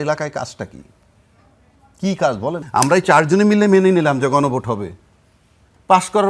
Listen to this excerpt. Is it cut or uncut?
cut